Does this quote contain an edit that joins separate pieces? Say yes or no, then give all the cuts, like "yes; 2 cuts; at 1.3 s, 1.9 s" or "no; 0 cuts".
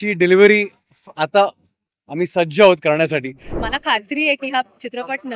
yes; 1 cut; at 3.6 s